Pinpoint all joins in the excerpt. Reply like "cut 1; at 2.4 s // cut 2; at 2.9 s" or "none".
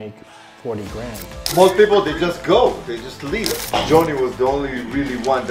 cut 1; at 1.4 s // cut 2; at 3.6 s